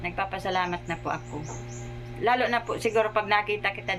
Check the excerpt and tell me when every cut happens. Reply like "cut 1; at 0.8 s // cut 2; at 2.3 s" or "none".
none